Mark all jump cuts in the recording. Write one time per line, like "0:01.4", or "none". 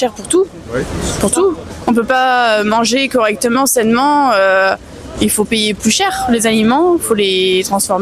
none